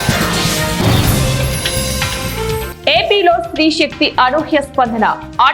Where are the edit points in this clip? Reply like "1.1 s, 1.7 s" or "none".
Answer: none